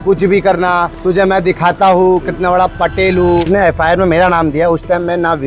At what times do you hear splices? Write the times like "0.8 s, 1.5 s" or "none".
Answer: 3.5 s